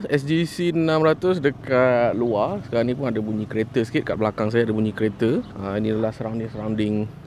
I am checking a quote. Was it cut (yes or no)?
no